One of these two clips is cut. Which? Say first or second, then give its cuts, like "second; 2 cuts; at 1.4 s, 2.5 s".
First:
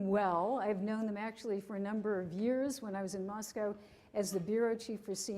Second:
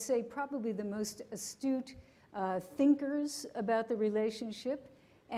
first; 1 cut; at 1.2 s